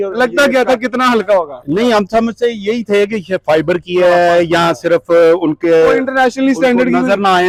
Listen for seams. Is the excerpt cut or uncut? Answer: uncut